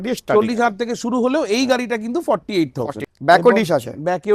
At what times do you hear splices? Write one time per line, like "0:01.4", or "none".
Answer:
0:03.0